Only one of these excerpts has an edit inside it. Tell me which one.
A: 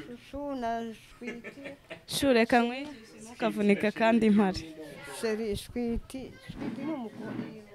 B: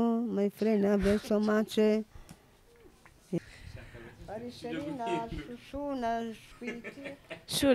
B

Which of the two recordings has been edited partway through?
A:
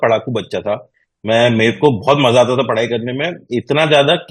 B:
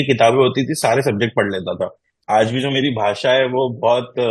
B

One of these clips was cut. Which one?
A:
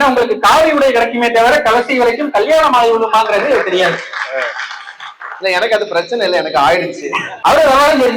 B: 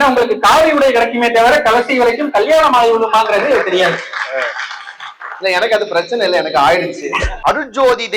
B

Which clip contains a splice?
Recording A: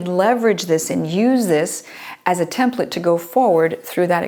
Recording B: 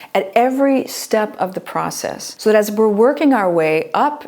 B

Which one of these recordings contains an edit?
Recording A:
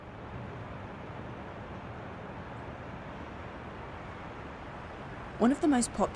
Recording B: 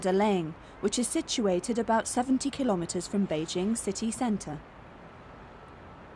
B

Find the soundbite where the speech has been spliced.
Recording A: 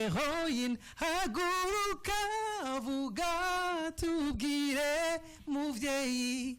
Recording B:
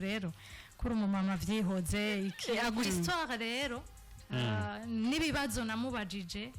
B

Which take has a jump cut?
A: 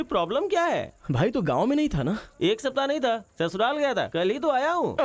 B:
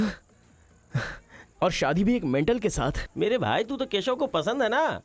B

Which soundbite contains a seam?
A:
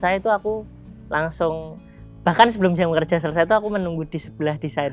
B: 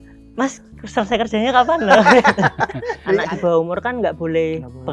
B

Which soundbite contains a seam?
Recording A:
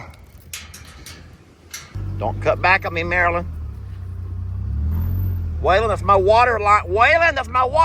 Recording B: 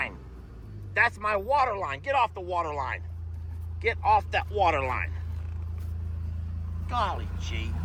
A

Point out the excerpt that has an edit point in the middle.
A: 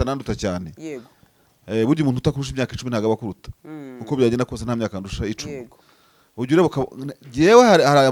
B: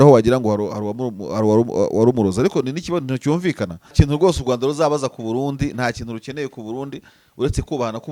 B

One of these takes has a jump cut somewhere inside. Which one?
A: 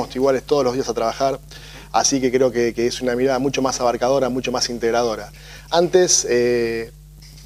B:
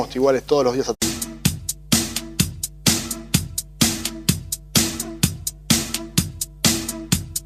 A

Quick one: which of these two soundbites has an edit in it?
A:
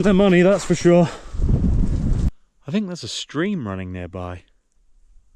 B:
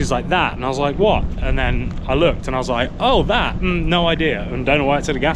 A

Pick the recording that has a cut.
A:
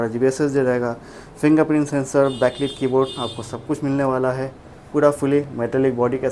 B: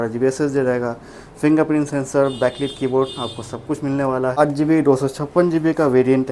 B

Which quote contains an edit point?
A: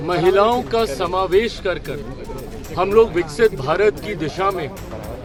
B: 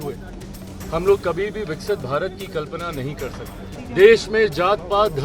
B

